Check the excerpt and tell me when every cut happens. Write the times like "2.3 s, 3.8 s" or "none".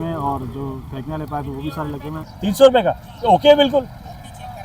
2.3 s